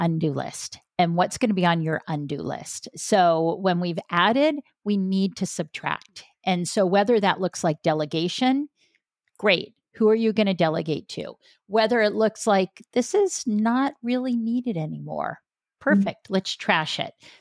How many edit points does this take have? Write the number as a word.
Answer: zero